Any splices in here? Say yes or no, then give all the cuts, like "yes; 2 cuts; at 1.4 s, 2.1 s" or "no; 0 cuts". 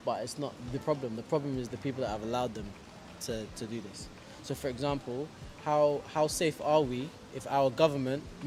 no; 0 cuts